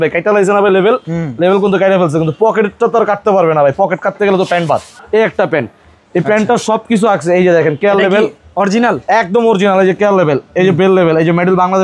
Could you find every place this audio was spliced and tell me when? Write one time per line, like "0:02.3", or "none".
0:04.9